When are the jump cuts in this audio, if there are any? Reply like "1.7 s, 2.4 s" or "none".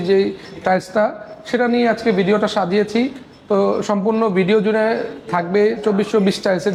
none